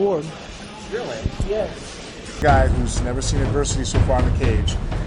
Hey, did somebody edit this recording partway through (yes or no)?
yes